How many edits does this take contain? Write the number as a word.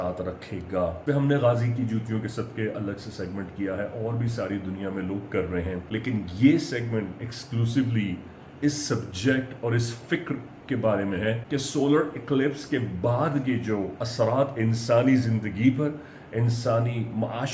three